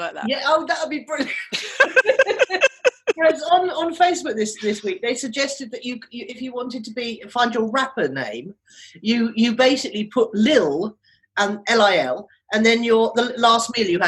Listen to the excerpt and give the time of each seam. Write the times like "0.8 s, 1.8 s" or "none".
none

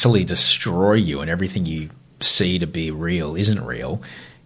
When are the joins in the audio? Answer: none

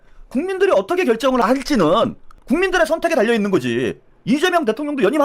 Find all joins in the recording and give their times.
1.4 s, 2.3 s

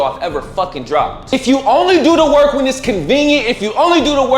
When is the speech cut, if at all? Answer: 1.3 s

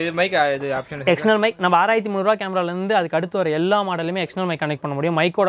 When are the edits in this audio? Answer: none

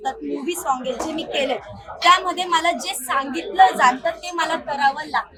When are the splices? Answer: none

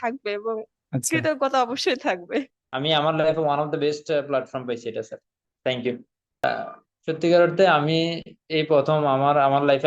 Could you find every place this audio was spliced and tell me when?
2.6 s, 6.4 s

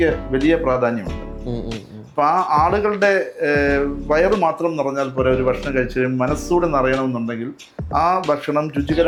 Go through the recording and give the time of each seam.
none

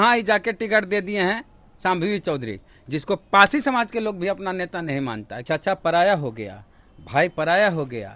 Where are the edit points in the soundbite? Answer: 5.3 s

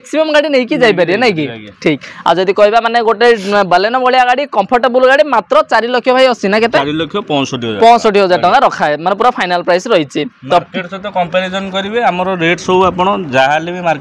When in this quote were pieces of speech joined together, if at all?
none

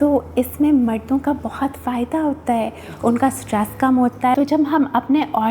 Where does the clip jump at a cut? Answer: 4.3 s

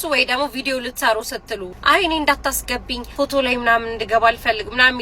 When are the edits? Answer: 1.7 s, 3.0 s

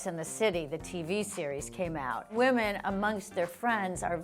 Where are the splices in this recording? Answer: 2.2 s

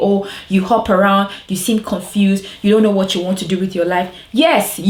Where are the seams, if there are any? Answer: none

